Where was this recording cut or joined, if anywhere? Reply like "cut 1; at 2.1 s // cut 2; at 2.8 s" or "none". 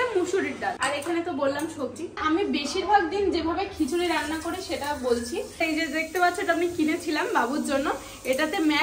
cut 1; at 0.8 s // cut 2; at 2.2 s // cut 3; at 5.6 s